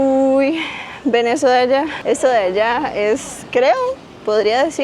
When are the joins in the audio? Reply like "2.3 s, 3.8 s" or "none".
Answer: 2.0 s

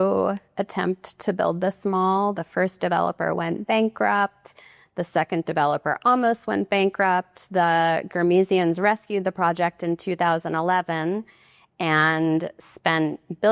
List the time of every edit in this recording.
none

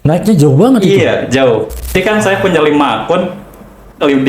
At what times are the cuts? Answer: 1.9 s

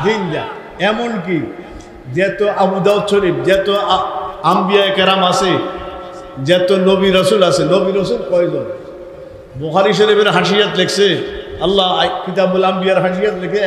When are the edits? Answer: none

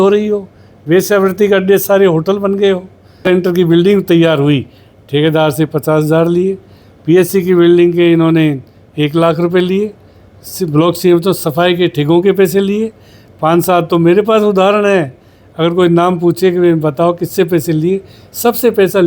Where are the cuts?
3.2 s

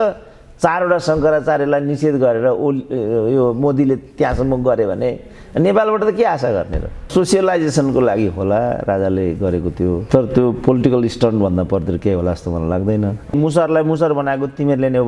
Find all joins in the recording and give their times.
7.1 s, 13.3 s

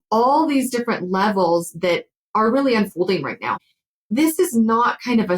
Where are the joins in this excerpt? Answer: 3.6 s

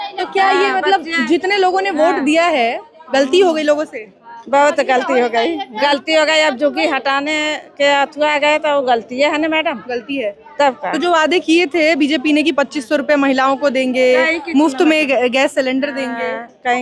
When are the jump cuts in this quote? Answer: none

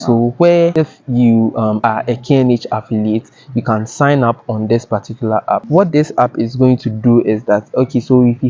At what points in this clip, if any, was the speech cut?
0.7 s, 1.8 s, 5.6 s

